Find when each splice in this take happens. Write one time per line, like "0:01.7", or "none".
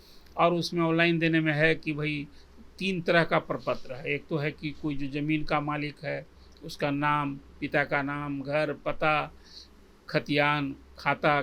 none